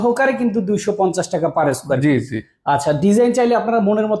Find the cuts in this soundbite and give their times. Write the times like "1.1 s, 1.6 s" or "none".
none